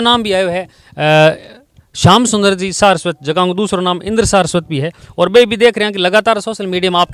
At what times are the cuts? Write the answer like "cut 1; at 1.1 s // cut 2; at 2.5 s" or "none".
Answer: none